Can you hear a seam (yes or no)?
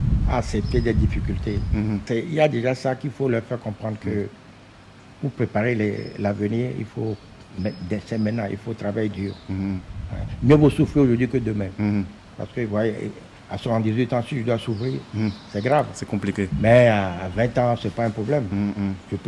yes